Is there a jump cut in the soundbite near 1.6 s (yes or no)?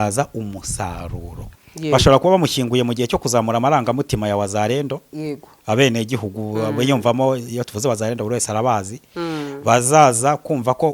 yes